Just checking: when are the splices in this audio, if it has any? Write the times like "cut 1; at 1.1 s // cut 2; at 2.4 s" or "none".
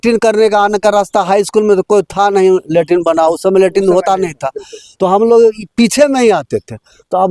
none